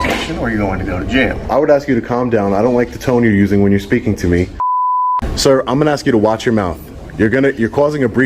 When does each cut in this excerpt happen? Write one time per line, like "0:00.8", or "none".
0:01.5
0:04.8